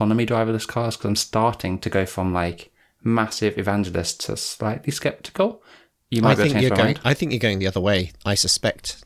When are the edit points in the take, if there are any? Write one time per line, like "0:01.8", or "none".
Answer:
none

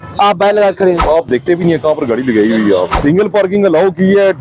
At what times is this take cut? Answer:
0:01.0
0:02.9

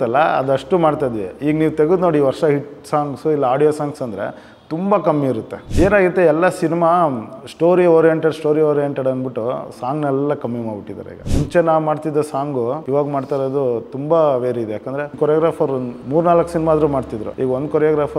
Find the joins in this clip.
0:05.6
0:11.2
0:12.8
0:15.1
0:17.2

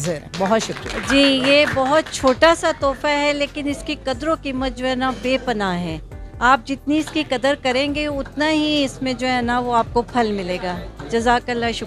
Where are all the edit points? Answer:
0:00.9

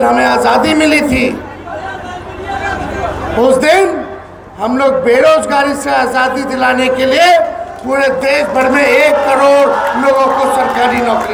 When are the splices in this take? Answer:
none

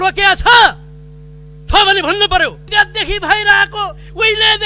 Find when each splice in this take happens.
0:02.6

